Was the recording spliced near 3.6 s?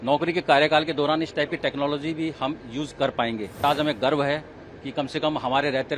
yes; 1 cut; at 3.6 s

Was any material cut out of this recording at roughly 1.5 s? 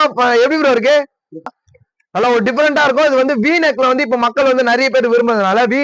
yes; 1 cut; at 1.5 s

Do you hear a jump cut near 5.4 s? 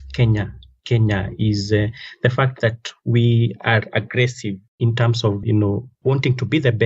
yes; 1 cut; at 5.4 s

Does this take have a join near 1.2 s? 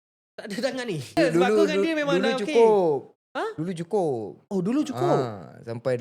yes; 1 cut; at 1.2 s

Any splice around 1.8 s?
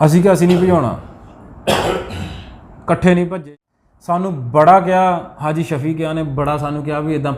no; 1 cut; at 3.4 s

